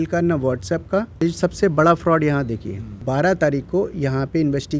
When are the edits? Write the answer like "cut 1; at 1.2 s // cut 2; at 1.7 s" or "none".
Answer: cut 1; at 1.2 s // cut 2; at 3.0 s